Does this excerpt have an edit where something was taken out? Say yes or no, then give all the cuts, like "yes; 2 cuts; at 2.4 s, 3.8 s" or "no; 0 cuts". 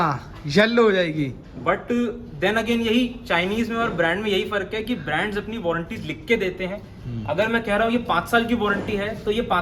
no; 0 cuts